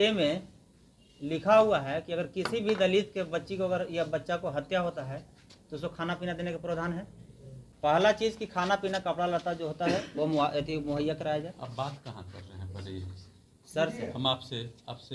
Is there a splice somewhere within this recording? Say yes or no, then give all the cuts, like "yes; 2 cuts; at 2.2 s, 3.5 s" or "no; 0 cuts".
no; 0 cuts